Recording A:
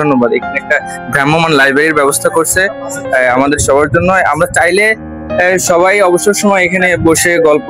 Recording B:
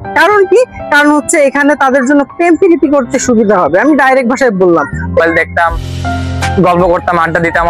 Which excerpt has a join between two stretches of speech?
B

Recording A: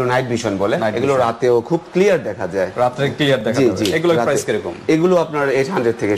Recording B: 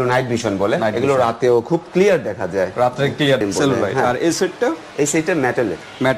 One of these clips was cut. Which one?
B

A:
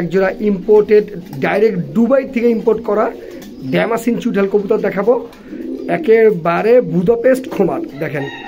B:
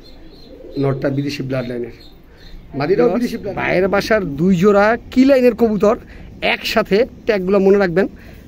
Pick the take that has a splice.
B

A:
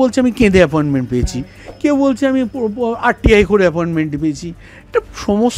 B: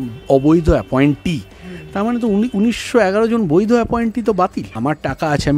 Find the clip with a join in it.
B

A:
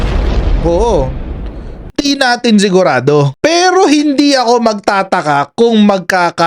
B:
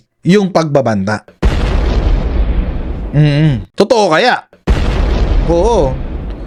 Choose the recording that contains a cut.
A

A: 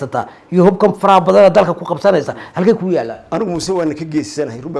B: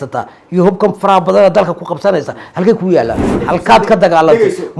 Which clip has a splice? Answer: B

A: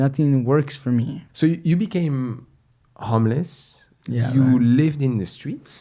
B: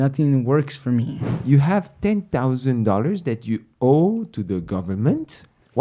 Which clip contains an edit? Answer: B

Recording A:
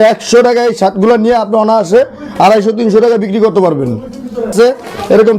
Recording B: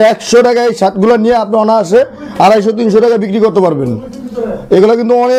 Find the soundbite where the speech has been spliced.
A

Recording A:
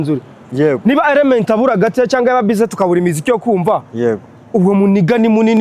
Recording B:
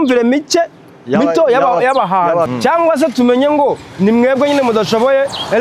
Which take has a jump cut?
B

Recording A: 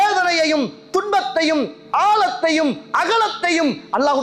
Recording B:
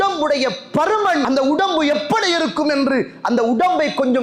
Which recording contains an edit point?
B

